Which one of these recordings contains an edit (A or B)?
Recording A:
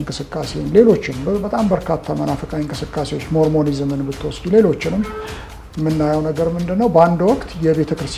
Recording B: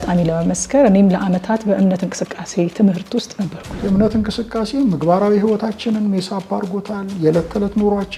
B